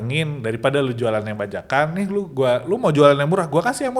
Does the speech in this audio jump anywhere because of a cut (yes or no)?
no